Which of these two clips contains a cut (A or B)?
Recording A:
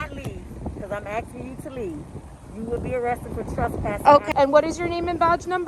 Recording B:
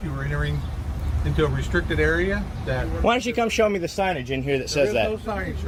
A